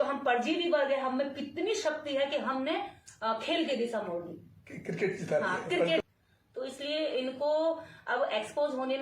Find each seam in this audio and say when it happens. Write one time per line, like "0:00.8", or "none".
0:06.0